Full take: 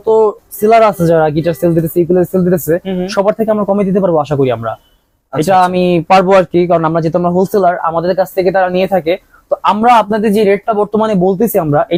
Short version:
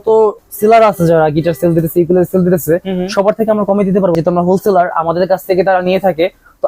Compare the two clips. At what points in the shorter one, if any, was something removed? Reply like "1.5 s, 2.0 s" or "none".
4.1 s